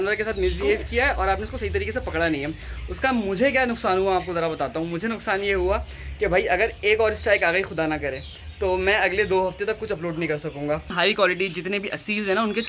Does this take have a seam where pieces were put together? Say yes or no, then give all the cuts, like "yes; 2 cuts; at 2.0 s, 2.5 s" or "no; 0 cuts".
yes; 1 cut; at 10.9 s